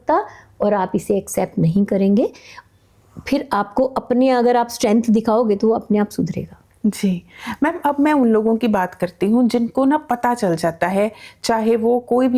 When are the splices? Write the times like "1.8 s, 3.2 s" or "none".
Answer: none